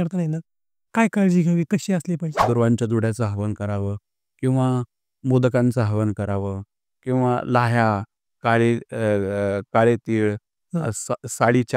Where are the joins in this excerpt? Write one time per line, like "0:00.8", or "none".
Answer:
0:02.4